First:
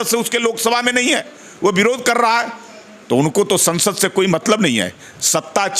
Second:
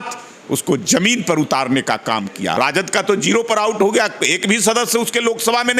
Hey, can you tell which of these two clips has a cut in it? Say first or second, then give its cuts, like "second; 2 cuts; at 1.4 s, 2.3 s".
second; 1 cut; at 2.5 s